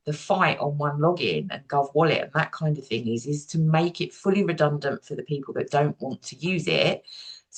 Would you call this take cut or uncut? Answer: uncut